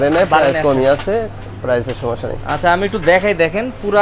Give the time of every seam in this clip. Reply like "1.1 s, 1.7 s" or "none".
none